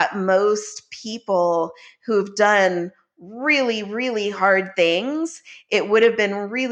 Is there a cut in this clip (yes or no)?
no